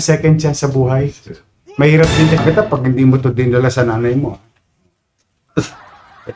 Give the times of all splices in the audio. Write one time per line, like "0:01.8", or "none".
0:02.4